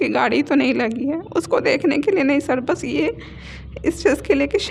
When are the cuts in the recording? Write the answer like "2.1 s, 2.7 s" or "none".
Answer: none